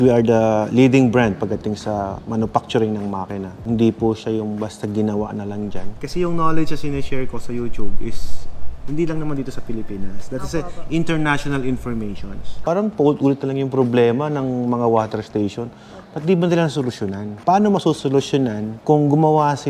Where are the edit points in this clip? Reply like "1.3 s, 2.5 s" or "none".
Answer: 3.5 s, 5.9 s, 12.6 s, 17.4 s

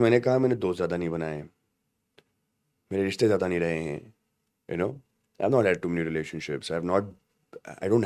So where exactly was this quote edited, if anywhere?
none

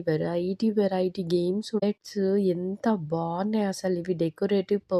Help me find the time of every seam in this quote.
1.8 s

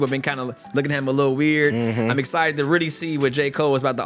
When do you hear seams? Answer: none

